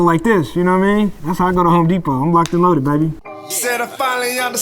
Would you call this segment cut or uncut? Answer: cut